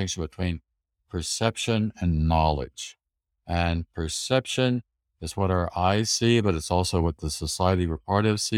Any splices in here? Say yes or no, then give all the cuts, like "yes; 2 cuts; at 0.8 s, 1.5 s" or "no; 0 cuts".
no; 0 cuts